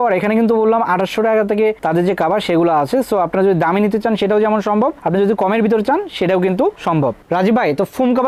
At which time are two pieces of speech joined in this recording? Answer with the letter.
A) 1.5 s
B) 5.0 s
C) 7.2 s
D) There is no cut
D